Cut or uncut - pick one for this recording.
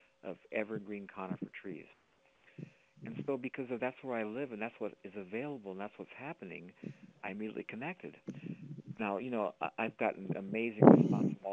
uncut